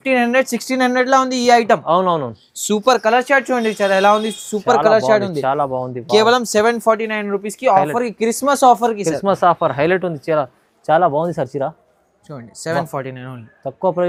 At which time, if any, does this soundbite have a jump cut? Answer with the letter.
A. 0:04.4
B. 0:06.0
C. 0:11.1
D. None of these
D